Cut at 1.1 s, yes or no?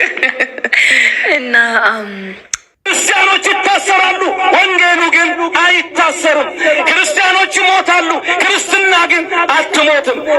no